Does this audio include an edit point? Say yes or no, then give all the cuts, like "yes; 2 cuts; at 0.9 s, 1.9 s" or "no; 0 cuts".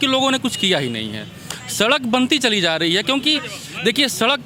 no; 0 cuts